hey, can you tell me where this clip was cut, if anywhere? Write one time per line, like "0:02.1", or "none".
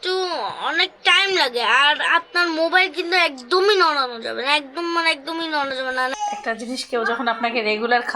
0:06.1